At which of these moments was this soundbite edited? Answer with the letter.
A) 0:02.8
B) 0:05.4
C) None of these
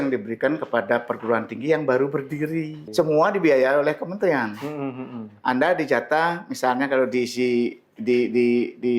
A